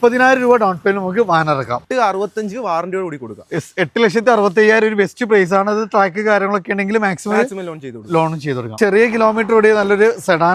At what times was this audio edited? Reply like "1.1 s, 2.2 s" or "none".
1.8 s, 8.7 s